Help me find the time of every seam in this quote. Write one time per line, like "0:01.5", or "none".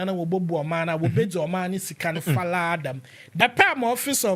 0:03.2